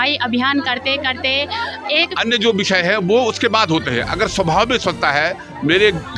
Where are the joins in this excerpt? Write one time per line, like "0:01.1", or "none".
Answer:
0:02.1